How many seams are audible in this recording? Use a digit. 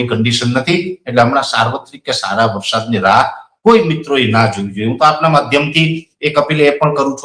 0